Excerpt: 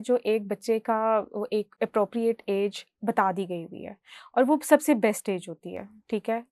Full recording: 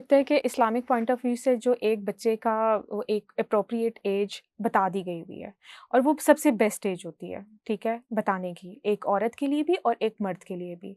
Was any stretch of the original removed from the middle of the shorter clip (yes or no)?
no